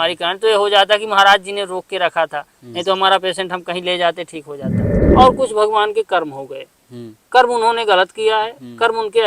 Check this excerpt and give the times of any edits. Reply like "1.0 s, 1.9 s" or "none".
4.8 s